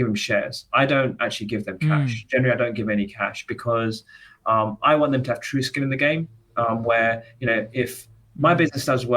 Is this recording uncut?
yes; 0 cuts

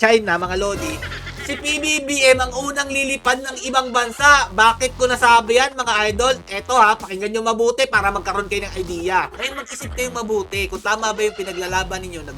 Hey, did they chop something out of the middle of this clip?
yes; 1 cut; at 9.3 s

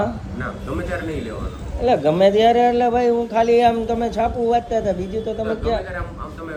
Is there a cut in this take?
no; 0 cuts

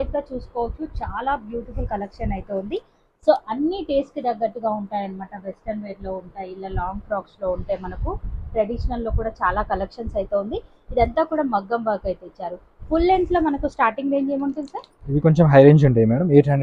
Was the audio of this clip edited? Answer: no; 0 cuts

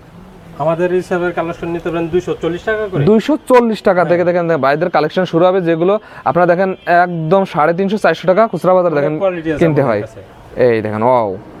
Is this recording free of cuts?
yes; 0 cuts

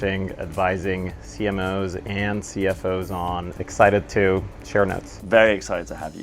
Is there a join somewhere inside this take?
yes; 2 cuts; at 3.5 s, 5.1 s

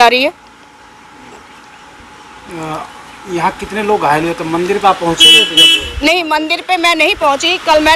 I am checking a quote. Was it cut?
no; 0 cuts

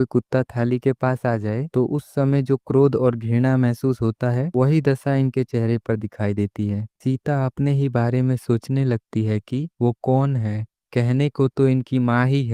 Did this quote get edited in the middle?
no; 0 cuts

